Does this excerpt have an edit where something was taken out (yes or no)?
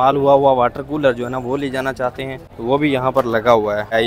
no